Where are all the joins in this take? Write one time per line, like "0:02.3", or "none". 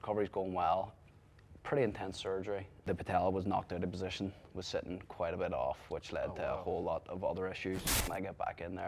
0:02.8
0:08.1